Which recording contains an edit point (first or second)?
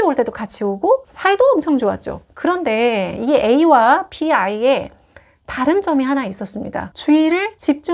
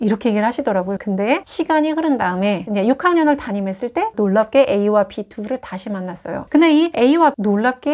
second